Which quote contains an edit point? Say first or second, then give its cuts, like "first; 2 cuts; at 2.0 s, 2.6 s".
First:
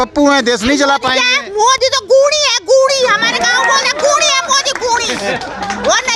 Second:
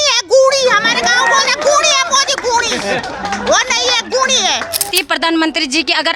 second; 1 cut; at 4.9 s